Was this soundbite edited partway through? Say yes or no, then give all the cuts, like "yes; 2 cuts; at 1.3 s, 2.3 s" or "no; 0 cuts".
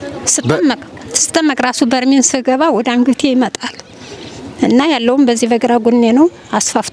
no; 0 cuts